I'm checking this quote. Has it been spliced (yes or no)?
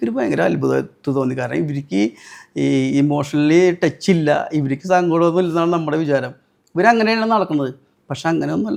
no